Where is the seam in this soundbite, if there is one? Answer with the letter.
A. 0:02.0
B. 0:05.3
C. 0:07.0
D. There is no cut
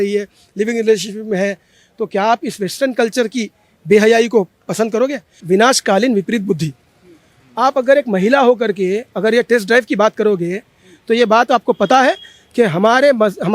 B